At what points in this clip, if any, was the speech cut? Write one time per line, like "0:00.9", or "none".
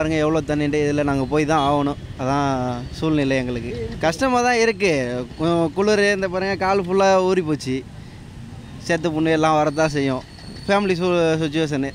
0:03.9